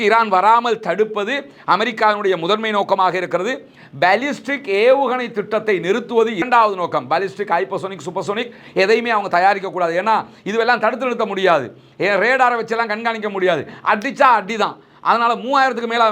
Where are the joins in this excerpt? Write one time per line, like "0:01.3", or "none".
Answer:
none